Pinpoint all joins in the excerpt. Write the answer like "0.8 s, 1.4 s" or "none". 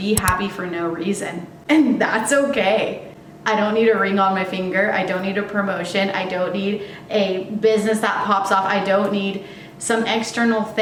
none